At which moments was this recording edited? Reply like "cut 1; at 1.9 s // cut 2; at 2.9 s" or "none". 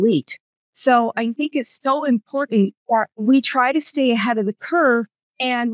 cut 1; at 3.2 s

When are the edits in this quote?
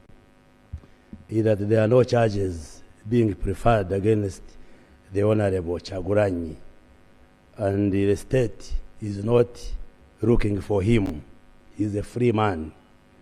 none

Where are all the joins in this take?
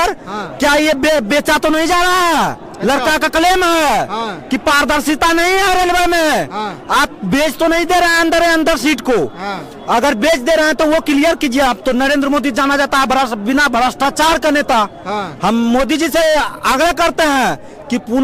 none

